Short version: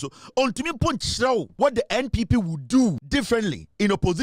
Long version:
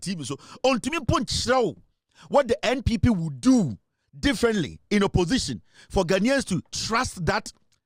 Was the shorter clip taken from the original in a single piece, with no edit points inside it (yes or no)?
no